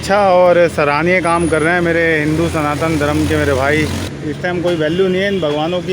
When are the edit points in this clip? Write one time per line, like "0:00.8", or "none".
0:04.1

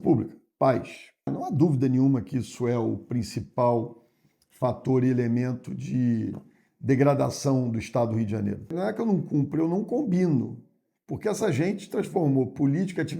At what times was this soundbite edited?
0:01.3
0:08.7

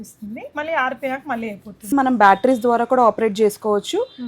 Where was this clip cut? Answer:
0:01.9

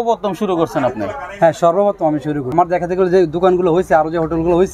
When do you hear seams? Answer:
0:02.5

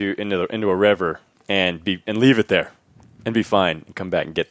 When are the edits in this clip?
none

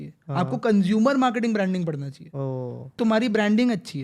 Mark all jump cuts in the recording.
0:03.0

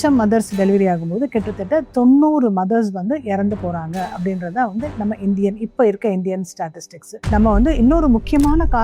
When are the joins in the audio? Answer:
0:07.2

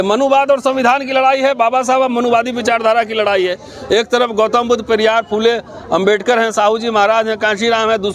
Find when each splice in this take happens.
none

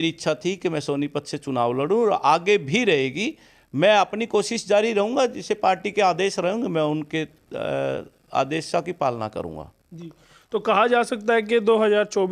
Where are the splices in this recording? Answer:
none

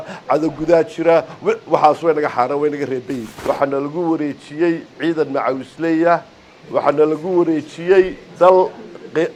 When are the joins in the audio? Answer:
none

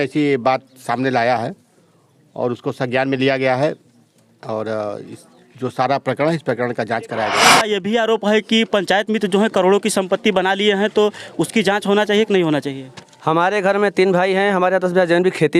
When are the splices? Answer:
0:07.7

